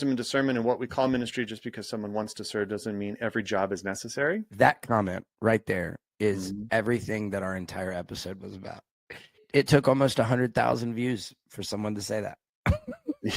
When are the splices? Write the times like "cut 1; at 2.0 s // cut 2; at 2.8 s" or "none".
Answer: cut 1; at 4.5 s // cut 2; at 9.4 s